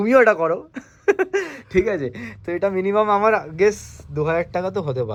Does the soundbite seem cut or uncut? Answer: uncut